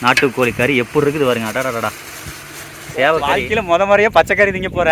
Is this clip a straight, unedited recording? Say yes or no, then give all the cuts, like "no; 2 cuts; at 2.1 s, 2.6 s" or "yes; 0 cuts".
no; 1 cut; at 3.4 s